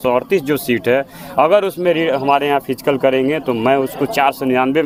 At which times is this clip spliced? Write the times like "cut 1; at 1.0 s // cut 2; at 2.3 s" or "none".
none